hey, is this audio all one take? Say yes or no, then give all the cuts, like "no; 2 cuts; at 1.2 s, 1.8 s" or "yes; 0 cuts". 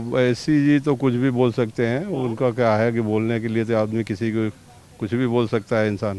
yes; 0 cuts